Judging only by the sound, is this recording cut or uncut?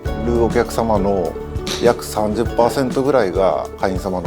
uncut